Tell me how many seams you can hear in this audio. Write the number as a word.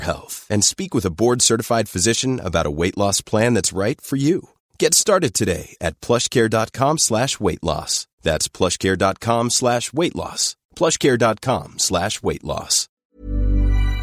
one